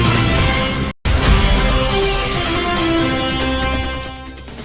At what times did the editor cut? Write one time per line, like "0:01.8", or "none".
0:01.0